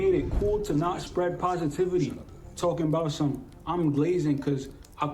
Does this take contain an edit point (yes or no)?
no